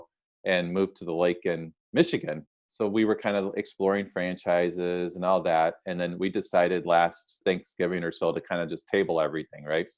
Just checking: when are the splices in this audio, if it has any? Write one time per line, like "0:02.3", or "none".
0:02.5
0:07.4